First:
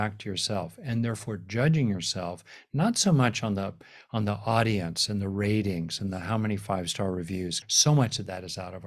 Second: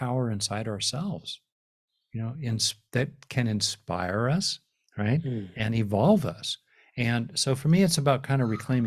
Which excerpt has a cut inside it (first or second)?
first